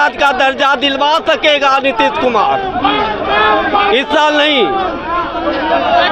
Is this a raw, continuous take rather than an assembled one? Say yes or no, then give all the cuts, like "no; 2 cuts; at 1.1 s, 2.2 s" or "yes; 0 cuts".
yes; 0 cuts